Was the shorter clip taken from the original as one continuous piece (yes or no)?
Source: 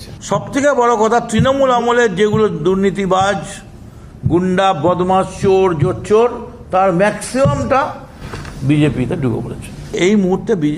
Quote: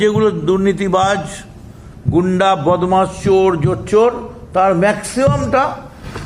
yes